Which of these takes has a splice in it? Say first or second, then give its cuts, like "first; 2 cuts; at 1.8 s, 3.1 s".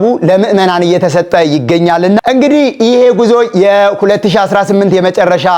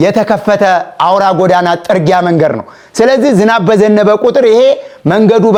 first; 1 cut; at 2.2 s